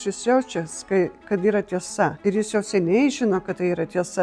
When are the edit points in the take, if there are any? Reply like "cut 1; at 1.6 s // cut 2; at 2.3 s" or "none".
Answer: cut 1; at 2.2 s